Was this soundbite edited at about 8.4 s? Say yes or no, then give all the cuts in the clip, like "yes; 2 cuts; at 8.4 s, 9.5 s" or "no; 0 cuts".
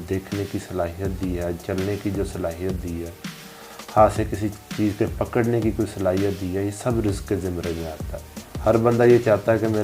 no; 0 cuts